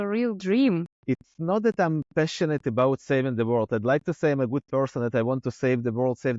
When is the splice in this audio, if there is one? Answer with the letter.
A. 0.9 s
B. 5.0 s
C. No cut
A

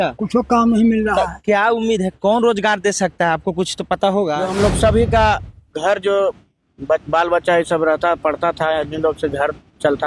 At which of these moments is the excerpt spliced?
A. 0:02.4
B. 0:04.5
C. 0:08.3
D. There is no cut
B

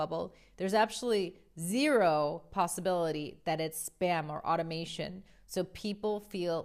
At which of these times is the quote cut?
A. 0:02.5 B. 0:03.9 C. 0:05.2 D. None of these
D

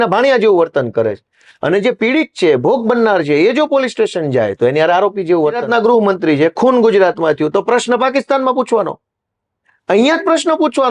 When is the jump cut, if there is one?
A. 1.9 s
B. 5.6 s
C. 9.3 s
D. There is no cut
B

